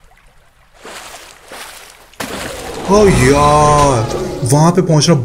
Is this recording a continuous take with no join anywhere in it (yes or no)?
no